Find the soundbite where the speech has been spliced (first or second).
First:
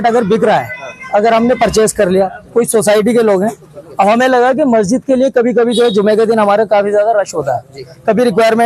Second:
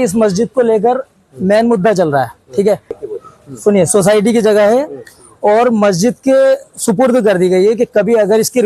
second